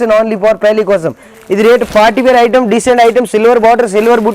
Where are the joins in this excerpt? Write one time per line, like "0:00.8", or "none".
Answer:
0:01.3